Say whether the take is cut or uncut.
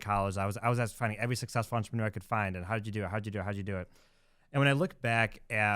uncut